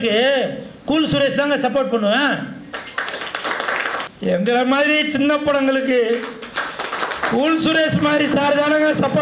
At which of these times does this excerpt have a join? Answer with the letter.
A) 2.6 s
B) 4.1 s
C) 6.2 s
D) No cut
B